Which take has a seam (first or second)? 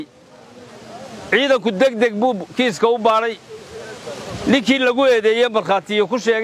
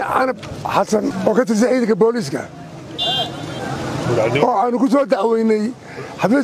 second